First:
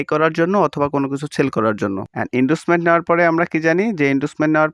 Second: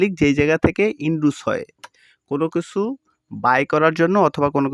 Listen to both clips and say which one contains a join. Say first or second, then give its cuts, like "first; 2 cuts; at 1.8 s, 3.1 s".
first; 1 cut; at 2.1 s